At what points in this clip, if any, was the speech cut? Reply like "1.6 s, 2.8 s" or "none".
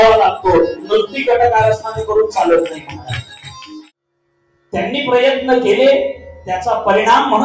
4.0 s